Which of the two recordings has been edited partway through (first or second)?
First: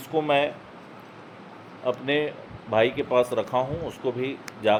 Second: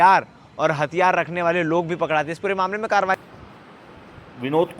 second